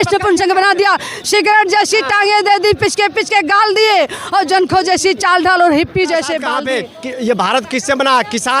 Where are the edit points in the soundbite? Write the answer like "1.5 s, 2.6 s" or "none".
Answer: 6.5 s